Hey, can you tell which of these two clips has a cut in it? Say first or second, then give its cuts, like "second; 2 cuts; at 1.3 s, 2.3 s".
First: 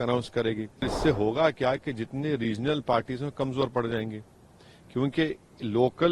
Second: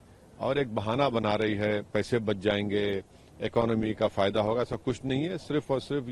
first; 1 cut; at 0.9 s